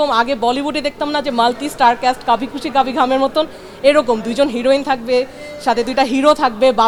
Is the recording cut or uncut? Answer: uncut